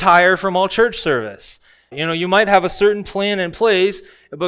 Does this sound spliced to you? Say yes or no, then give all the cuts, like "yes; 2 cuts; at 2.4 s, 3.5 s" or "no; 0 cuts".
yes; 1 cut; at 2.0 s